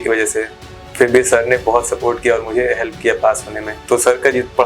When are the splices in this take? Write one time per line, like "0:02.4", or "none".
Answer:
0:03.7